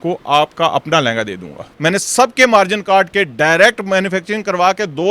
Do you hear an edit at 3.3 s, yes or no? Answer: no